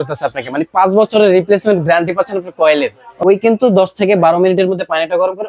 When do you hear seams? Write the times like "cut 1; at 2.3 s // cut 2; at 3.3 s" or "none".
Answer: cut 1; at 3.0 s